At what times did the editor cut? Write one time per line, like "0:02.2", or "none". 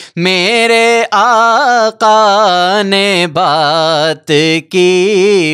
none